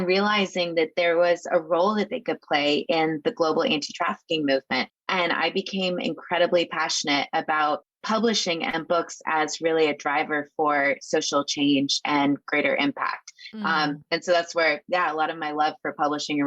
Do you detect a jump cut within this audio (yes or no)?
yes